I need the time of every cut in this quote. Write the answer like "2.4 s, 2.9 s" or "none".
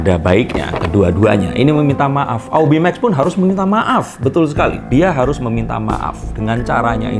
none